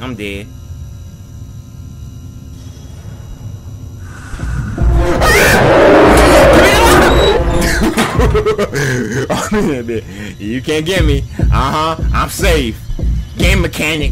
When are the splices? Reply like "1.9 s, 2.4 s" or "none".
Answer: none